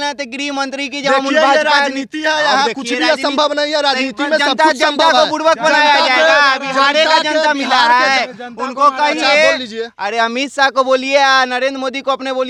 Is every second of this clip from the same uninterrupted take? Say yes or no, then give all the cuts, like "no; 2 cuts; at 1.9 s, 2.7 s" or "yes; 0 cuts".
yes; 0 cuts